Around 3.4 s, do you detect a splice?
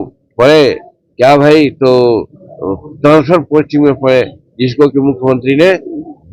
no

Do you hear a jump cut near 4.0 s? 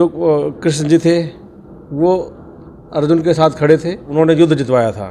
yes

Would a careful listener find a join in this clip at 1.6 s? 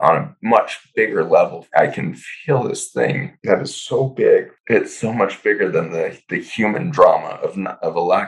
yes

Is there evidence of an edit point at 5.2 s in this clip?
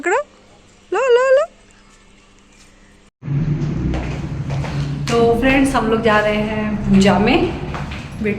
no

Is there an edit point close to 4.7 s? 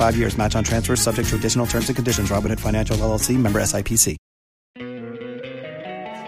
yes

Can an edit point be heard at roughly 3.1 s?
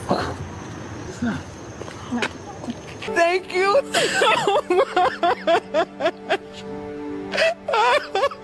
yes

